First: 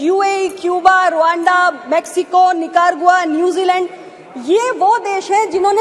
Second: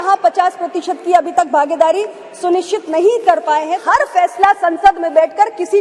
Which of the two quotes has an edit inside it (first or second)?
second